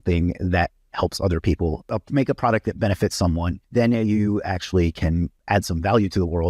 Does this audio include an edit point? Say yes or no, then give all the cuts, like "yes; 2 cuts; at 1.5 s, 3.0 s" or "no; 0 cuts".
yes; 3 cuts; at 1.9 s, 3.6 s, 5.4 s